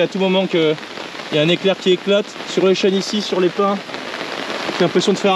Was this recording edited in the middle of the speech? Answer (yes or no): no